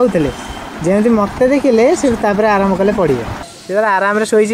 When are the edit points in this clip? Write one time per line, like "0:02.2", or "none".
0:03.3